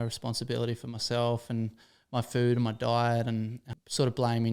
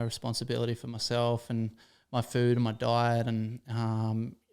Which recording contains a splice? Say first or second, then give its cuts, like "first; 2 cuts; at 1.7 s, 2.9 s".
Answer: first; 1 cut; at 3.6 s